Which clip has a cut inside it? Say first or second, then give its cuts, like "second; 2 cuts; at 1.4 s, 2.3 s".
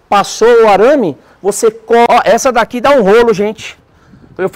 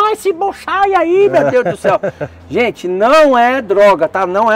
first; 1 cut; at 2.1 s